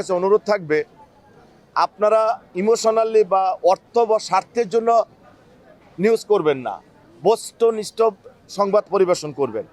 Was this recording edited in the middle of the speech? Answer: no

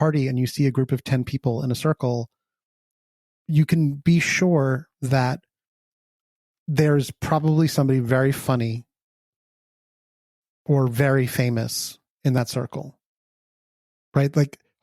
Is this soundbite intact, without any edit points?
no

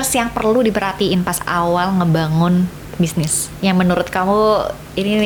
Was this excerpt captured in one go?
yes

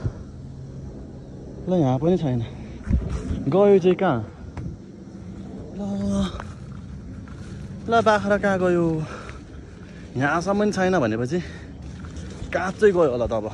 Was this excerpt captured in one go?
yes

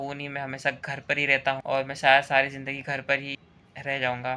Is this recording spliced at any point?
no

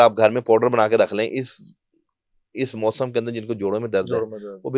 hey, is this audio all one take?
yes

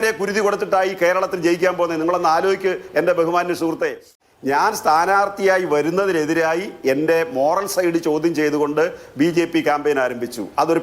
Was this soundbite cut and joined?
yes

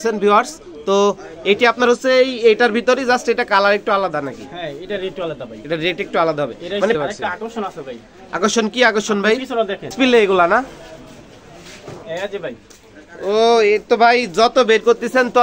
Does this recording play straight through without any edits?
no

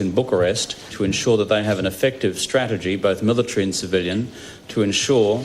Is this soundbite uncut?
no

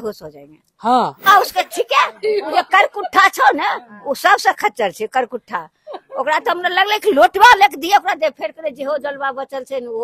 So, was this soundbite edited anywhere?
yes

